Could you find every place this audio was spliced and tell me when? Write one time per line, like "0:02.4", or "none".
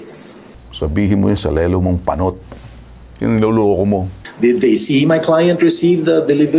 0:04.2